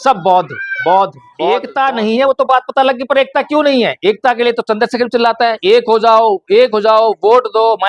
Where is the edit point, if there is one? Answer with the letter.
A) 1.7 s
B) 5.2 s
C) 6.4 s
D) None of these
A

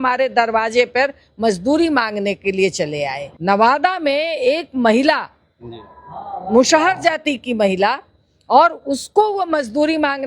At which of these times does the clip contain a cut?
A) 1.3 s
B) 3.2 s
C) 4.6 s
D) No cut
B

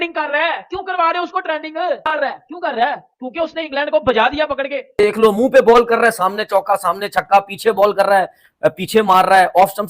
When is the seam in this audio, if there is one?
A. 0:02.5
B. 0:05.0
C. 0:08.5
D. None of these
B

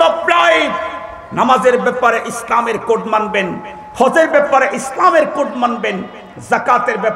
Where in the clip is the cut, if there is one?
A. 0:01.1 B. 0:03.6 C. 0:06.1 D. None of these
D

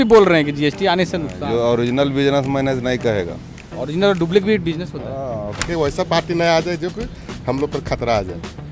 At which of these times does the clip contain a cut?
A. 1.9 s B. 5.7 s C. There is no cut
B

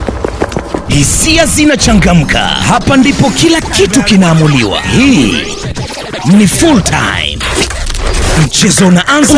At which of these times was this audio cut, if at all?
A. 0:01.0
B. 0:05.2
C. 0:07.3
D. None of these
D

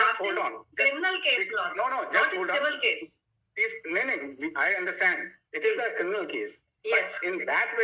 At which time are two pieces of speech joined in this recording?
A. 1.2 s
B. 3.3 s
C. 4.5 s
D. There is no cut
D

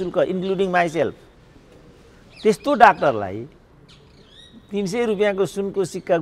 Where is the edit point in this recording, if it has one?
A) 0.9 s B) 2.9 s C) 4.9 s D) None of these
D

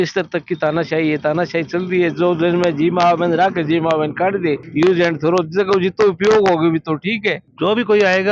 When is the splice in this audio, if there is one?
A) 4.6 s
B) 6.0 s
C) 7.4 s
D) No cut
C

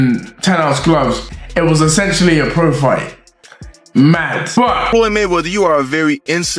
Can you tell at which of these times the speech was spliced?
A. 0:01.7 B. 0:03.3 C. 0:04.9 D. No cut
C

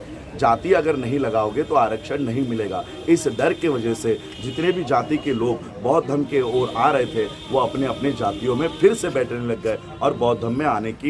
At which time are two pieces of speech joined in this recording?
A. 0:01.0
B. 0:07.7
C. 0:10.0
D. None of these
D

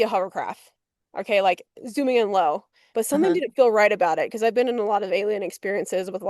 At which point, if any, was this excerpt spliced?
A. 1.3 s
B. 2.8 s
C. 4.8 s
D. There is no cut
B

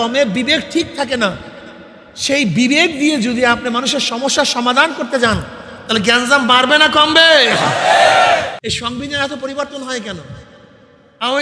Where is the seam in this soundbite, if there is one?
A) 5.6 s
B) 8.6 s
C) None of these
B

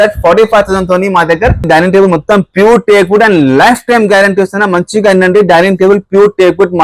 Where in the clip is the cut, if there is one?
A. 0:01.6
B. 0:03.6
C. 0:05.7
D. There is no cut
A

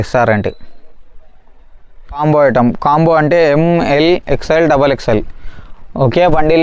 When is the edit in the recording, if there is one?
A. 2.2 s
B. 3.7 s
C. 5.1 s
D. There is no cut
A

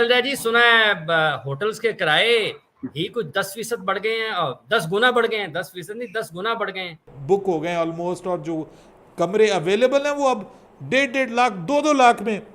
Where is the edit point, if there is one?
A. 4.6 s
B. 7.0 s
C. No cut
B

